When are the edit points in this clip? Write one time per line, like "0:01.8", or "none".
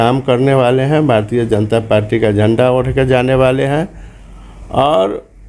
none